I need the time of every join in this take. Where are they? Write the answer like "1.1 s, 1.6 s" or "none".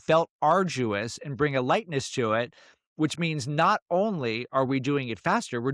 none